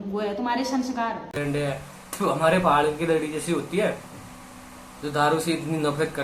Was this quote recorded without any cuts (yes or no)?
no